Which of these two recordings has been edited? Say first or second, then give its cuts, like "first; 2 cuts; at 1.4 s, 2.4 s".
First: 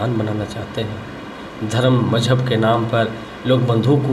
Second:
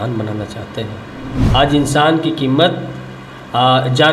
second; 1 cut; at 1.4 s